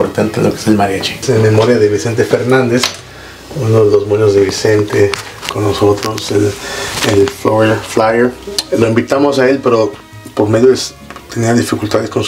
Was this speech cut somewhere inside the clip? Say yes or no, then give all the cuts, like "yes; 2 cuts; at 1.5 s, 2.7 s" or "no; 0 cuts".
no; 0 cuts